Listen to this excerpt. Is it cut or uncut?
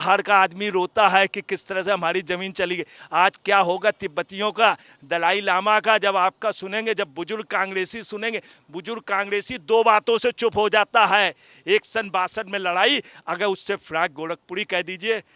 uncut